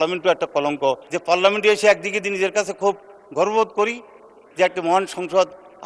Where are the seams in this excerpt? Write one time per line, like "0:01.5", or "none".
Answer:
0:01.1